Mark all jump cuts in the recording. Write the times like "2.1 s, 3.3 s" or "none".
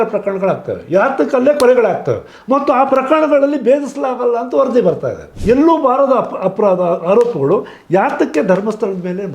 5.3 s